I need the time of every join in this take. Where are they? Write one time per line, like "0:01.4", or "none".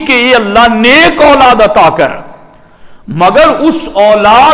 none